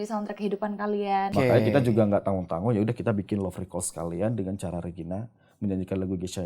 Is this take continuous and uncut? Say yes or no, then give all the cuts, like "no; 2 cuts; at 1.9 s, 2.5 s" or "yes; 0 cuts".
no; 1 cut; at 1.3 s